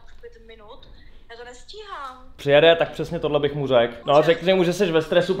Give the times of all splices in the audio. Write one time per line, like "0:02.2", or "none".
0:02.4
0:04.0